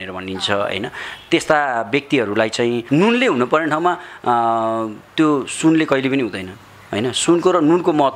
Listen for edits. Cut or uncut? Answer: cut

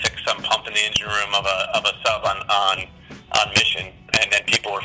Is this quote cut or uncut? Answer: uncut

